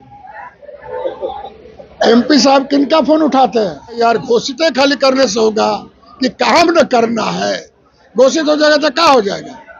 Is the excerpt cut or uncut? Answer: cut